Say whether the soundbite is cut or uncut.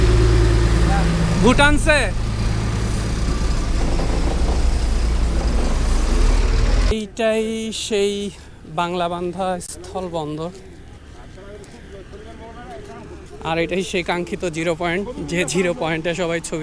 uncut